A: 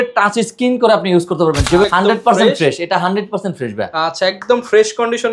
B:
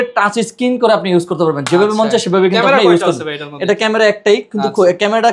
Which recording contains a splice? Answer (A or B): A